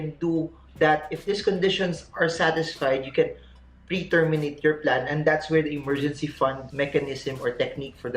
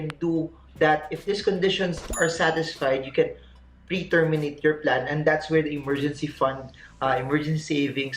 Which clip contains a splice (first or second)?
first